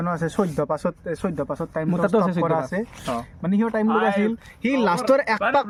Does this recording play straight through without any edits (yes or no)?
yes